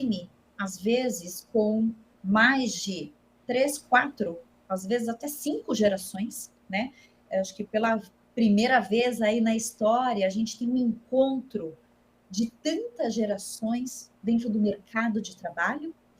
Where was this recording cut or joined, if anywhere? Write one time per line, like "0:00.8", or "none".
0:02.1